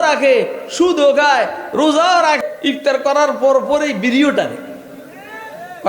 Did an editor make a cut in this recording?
yes; 1 cut; at 2.4 s

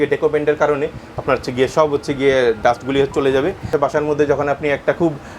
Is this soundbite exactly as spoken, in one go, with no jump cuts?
no; 1 cut; at 3.7 s

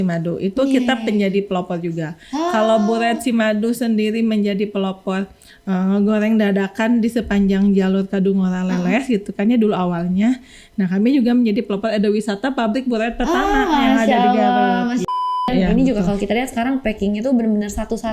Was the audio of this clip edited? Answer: yes; 1 cut; at 15.4 s

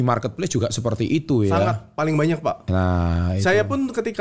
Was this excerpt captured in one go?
yes; 0 cuts

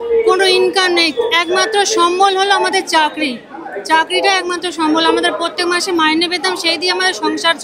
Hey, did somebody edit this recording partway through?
no; 0 cuts

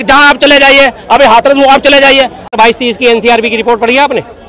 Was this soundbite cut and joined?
yes; 1 cut; at 2.5 s

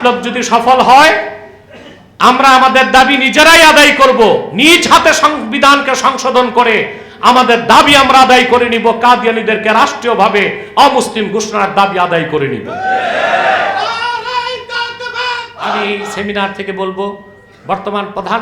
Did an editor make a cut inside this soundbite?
yes; 1 cut; at 15.7 s

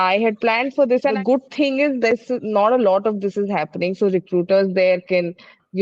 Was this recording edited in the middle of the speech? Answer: yes; 1 cut; at 1.2 s

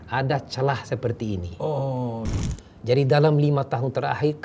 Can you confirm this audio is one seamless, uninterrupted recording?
no; 1 cut; at 2.4 s

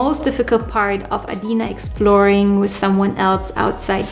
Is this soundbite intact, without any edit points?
yes; 0 cuts

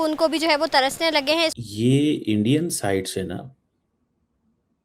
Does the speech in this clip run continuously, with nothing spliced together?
no; 1 cut; at 1.6 s

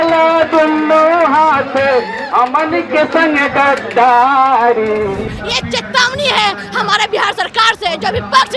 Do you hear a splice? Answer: yes; 1 cut; at 5.3 s

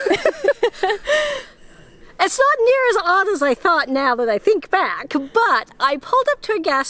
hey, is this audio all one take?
yes; 0 cuts

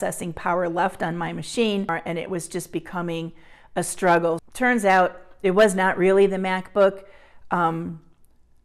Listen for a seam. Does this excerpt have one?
yes; 2 cuts; at 2.0 s, 4.4 s

